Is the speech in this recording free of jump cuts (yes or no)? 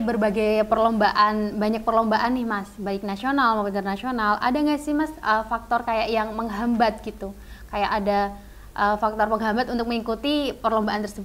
yes